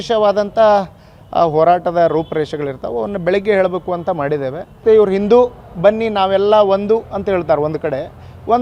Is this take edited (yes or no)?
yes